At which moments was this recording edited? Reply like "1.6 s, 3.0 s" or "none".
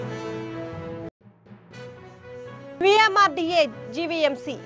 1.1 s